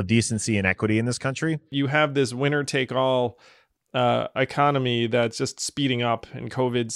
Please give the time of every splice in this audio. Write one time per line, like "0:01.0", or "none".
0:01.7